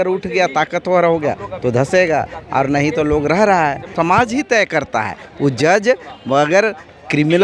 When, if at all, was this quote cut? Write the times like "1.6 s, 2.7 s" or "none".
3.9 s